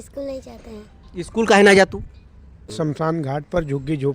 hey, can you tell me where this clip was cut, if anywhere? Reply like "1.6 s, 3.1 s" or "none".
2.7 s